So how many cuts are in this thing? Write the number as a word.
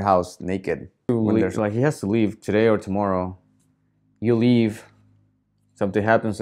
one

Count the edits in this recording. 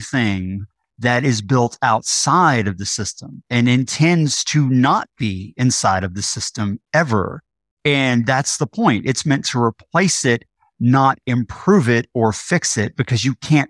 zero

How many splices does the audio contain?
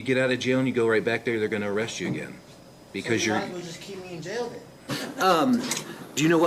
one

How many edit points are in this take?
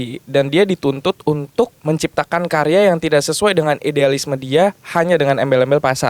one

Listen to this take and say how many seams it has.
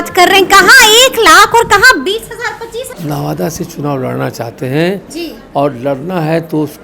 one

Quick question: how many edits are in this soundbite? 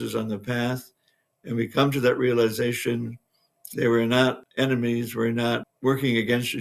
one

